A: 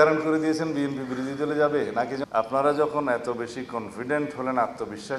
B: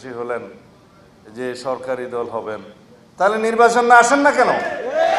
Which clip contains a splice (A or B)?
A